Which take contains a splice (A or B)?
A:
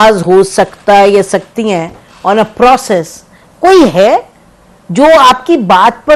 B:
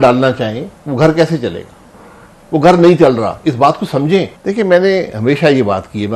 B